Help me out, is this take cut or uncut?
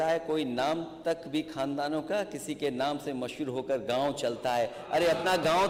uncut